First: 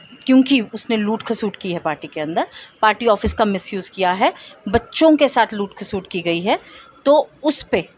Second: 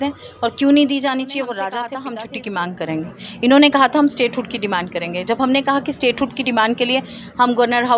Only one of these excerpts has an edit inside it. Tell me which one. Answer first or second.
second